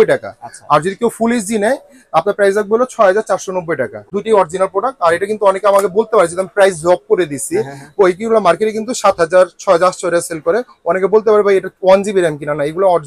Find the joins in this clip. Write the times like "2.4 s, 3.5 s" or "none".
4.2 s